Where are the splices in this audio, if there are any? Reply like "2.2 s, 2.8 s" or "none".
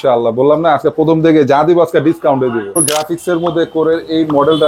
2.8 s